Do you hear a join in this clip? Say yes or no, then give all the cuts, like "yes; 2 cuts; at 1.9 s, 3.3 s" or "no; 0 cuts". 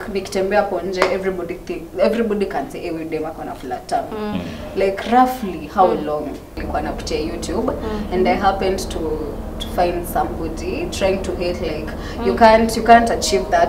yes; 1 cut; at 6.6 s